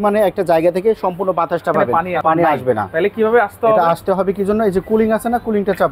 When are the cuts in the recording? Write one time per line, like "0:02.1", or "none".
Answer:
0:02.0